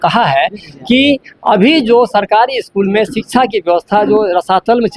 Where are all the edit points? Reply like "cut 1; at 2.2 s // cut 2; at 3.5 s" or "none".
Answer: none

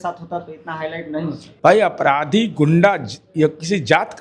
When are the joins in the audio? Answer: cut 1; at 1.4 s

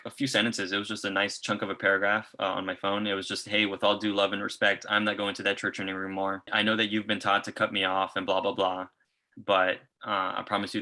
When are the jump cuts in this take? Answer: cut 1; at 6.5 s // cut 2; at 9.8 s

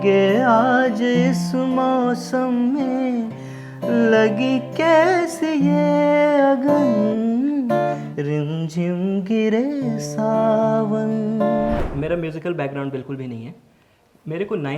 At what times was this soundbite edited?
cut 1; at 11.8 s

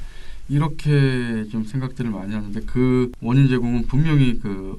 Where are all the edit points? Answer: cut 1; at 3.2 s

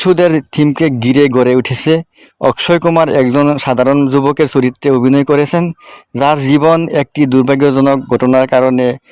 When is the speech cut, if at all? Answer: none

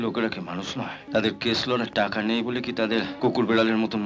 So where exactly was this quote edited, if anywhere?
cut 1; at 1.0 s // cut 2; at 3.1 s

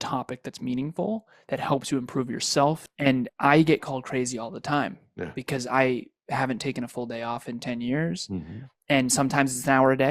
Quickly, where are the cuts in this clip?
cut 1; at 2.9 s

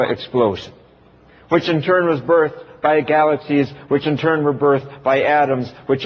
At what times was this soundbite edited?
cut 1; at 1.6 s

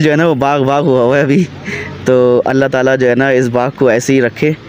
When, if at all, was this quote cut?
none

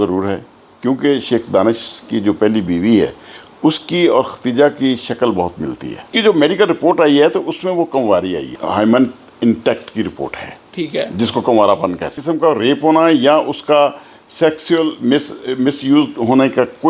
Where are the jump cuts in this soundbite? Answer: cut 1; at 6.1 s // cut 2; at 8.6 s // cut 3; at 12.1 s

